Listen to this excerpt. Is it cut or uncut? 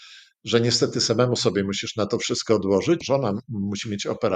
cut